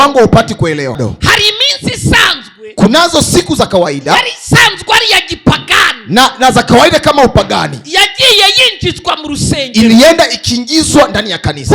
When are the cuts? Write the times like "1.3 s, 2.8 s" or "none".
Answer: 1.0 s